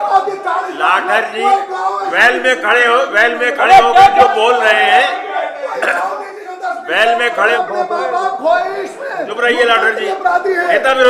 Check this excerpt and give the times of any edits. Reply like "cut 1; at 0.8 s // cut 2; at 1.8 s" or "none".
cut 1; at 7.5 s